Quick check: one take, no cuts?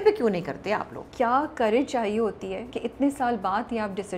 no; 2 cuts; at 1.0 s, 2.7 s

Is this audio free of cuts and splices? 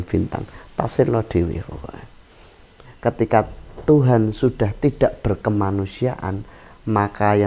no; 1 cut; at 2.9 s

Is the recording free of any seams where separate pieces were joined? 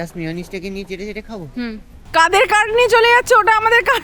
no; 1 cut; at 1.9 s

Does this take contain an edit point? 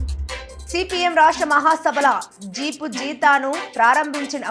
no; 0 cuts

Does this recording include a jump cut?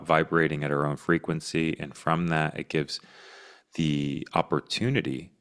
no; 0 cuts

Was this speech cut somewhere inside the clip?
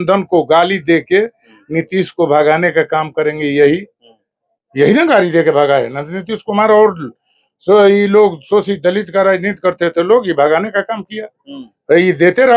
no; 0 cuts

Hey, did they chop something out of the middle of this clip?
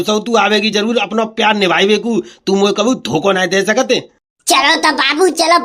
no; 0 cuts

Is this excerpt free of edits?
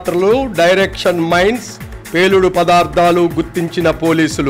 yes; 0 cuts

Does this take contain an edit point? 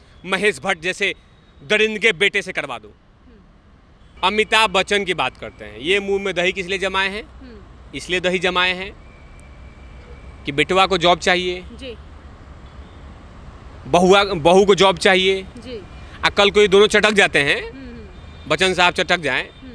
yes; 1 cut; at 4.0 s

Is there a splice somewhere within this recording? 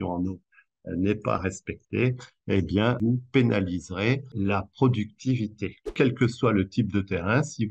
yes; 3 cuts; at 3.0 s, 4.3 s, 5.9 s

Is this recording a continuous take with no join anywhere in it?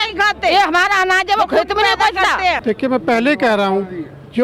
no; 1 cut; at 2.6 s

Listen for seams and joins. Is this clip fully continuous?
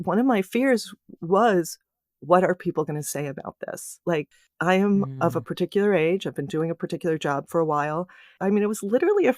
no; 1 cut; at 8.3 s

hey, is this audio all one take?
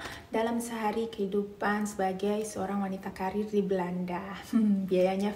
yes; 0 cuts

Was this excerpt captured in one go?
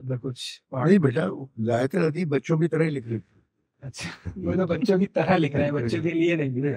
yes; 0 cuts

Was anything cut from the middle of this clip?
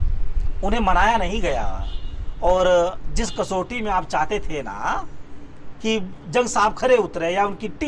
no; 0 cuts

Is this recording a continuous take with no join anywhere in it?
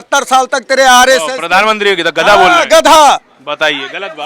yes; 0 cuts

